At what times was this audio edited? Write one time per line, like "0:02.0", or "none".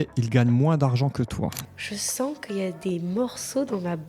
0:01.7